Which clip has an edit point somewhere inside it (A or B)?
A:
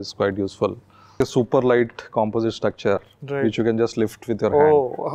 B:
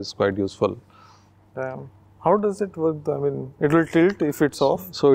A